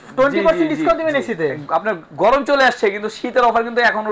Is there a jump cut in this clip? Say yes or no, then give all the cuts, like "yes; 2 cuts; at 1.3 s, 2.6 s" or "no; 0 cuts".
no; 0 cuts